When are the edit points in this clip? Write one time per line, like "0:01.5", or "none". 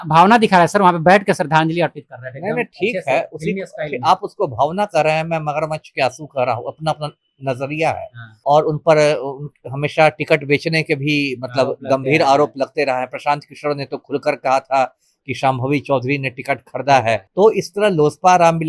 0:08.4
0:17.3